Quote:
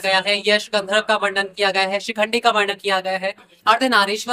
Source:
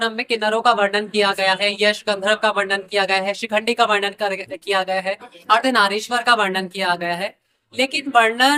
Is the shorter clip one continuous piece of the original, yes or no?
no